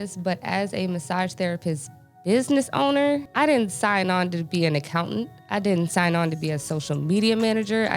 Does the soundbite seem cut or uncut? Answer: cut